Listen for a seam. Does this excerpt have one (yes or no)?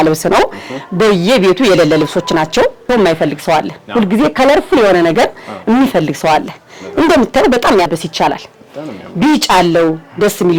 yes